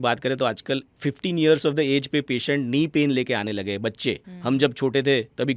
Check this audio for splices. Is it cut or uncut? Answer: cut